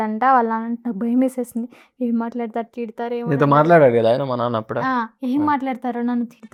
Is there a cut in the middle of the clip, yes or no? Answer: no